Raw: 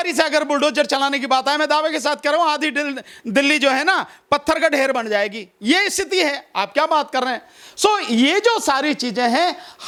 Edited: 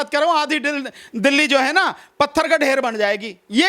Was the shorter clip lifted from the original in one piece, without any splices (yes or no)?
yes